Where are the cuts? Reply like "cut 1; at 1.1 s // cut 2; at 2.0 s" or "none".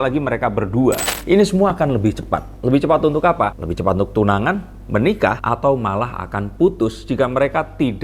cut 1; at 1.0 s // cut 2; at 5.4 s